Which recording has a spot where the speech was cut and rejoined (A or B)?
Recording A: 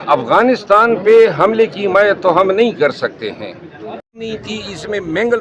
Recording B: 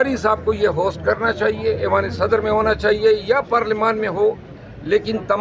A